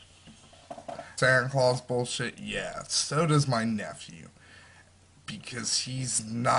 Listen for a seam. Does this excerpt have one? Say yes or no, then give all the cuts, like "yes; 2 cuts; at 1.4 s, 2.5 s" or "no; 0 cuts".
no; 0 cuts